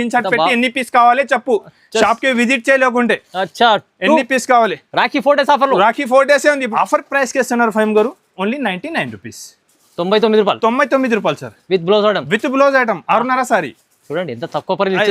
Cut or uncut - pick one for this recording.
cut